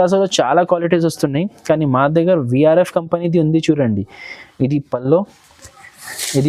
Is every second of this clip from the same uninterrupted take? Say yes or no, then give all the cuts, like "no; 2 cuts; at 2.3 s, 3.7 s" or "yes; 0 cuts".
yes; 0 cuts